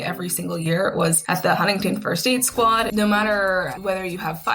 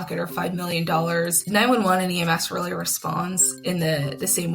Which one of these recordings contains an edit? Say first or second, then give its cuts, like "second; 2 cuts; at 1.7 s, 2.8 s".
first; 3 cuts; at 1.2 s, 2.9 s, 3.8 s